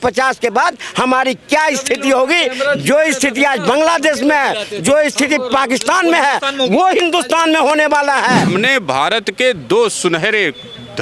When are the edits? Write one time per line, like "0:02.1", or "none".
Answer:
0:08.5